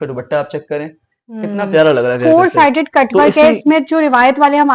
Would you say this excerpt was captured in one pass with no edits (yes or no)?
yes